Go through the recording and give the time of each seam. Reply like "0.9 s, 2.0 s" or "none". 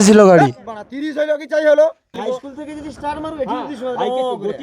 2.1 s

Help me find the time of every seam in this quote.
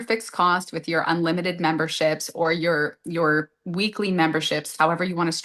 none

